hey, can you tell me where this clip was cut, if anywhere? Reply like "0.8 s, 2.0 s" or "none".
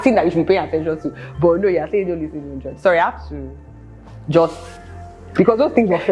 none